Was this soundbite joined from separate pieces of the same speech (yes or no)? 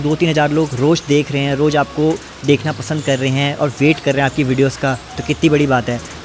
no